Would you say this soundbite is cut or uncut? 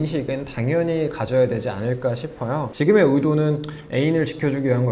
cut